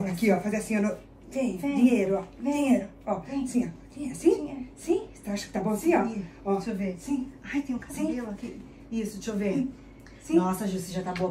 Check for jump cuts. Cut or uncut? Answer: uncut